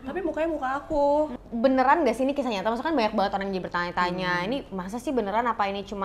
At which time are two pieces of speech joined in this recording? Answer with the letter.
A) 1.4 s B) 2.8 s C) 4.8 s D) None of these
A